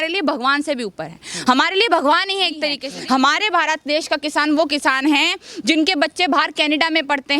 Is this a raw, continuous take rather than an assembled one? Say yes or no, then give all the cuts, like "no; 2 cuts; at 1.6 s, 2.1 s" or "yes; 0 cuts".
no; 1 cut; at 2.9 s